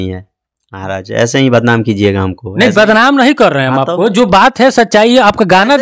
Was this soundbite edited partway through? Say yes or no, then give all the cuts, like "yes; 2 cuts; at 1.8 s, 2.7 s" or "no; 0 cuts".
no; 0 cuts